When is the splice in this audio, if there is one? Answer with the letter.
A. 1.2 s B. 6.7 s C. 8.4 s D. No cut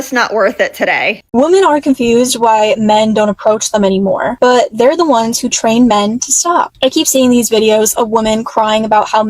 A